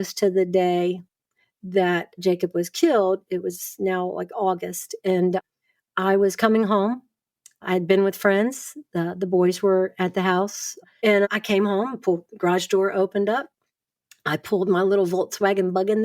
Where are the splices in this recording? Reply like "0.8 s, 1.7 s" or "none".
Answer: 10.8 s